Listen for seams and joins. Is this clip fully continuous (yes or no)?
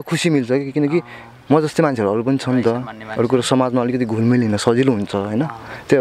yes